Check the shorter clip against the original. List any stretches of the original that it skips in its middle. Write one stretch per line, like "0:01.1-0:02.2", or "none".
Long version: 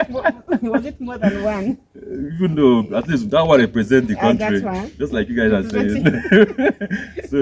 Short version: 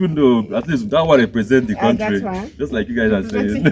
none